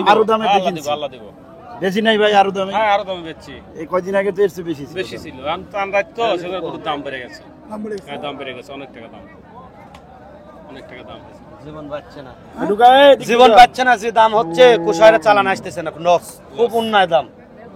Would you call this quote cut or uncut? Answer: uncut